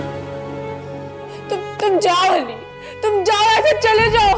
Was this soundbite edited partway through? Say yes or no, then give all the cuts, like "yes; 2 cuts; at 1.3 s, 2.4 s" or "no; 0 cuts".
no; 0 cuts